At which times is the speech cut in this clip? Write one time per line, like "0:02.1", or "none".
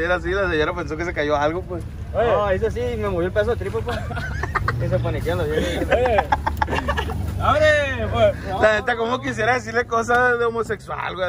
none